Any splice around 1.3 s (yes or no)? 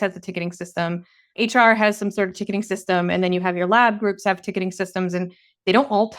yes